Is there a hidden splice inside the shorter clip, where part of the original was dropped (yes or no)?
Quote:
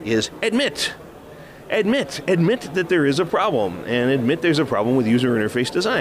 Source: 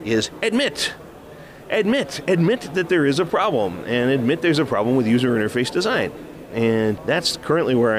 no